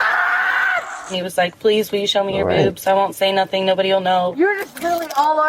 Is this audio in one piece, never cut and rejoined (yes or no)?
no